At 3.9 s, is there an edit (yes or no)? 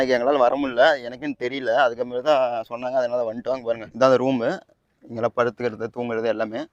yes